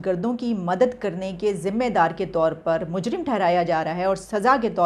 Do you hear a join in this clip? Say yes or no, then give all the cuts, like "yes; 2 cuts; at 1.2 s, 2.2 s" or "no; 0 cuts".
no; 0 cuts